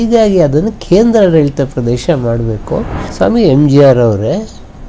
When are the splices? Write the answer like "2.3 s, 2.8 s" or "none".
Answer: 3.0 s